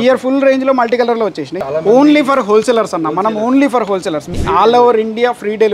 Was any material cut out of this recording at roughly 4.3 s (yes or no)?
yes